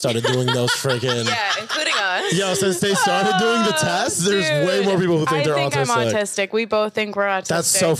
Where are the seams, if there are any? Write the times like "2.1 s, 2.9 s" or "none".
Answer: none